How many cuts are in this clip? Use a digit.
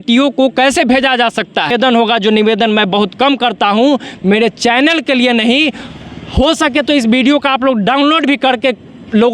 1